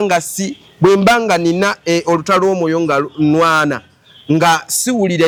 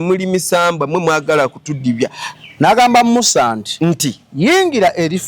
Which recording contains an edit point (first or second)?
second